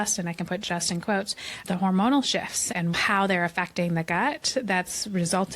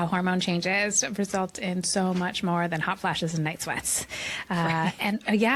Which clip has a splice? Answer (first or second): first